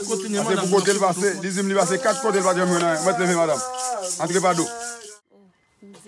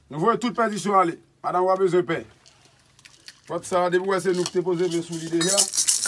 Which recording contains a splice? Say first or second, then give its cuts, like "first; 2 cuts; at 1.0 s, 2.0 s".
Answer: first; 1 cut; at 5.0 s